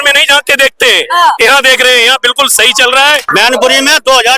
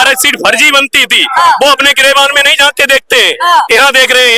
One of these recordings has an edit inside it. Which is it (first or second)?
first